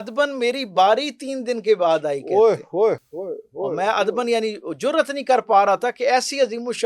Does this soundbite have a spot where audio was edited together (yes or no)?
no